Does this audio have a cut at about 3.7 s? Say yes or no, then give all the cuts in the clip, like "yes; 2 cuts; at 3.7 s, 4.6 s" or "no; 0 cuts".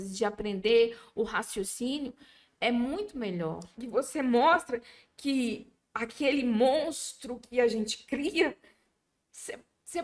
yes; 1 cut; at 3.7 s